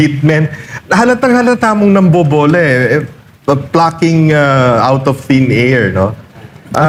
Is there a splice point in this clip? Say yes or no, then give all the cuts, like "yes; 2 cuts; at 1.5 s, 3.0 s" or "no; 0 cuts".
no; 0 cuts